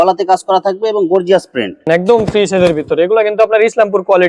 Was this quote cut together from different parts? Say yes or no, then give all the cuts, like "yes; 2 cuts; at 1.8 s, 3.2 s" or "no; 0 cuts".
yes; 1 cut; at 1.9 s